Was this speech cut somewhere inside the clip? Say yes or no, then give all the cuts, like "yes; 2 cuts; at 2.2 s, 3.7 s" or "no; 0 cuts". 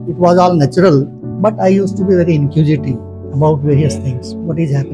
yes; 1 cut; at 1.2 s